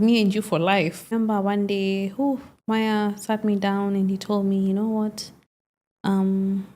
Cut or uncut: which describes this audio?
cut